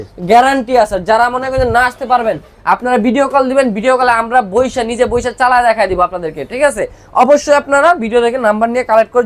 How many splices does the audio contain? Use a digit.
0